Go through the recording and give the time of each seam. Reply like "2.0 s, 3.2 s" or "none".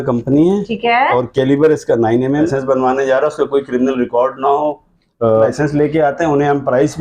2.5 s, 5.5 s